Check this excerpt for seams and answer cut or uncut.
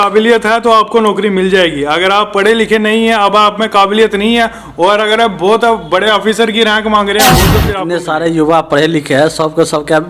cut